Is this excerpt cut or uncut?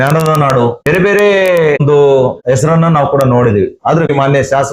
uncut